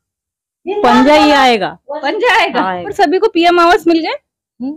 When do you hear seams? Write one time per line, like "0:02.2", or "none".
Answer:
0:02.8